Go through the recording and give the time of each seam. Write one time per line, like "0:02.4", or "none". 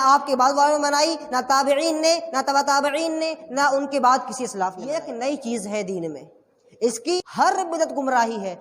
0:05.1
0:07.2